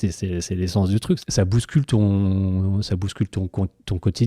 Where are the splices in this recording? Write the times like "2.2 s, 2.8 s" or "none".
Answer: 1.2 s

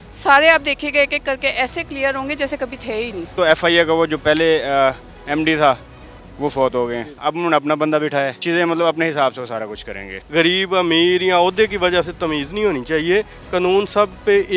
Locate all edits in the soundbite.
3.3 s, 7.2 s, 8.4 s, 10.1 s

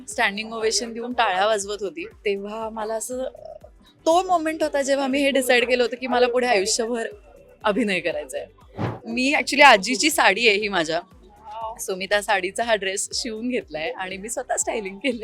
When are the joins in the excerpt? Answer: 2.1 s, 9.0 s

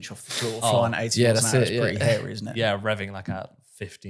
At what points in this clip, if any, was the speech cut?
none

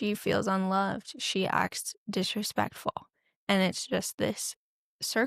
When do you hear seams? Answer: none

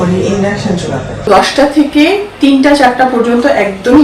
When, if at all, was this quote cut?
1.3 s

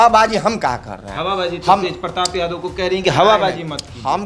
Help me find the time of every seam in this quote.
none

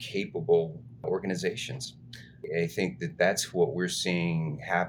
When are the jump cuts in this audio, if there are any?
1.0 s

